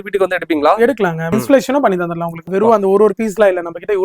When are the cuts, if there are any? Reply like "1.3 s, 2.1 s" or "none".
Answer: 1.3 s, 2.5 s